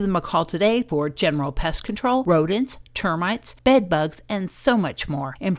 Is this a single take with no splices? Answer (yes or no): yes